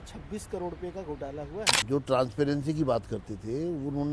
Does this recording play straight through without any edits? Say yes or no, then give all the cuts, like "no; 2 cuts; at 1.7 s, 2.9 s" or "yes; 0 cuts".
no; 1 cut; at 1.7 s